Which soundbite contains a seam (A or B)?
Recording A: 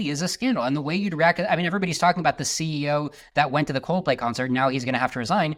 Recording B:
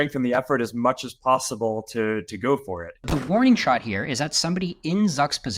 B